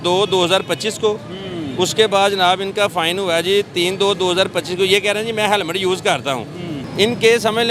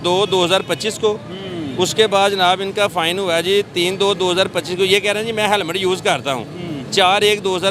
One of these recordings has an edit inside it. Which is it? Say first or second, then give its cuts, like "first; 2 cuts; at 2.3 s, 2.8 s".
first; 1 cut; at 6.8 s